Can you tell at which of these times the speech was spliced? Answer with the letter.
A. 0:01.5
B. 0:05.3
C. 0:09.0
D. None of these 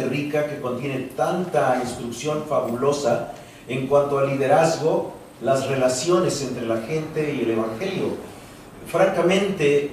D